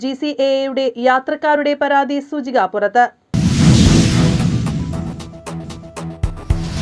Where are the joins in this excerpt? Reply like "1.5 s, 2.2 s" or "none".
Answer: 3.3 s